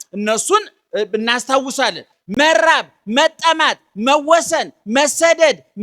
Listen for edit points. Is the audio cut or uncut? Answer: cut